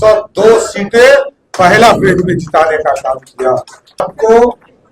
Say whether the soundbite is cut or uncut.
cut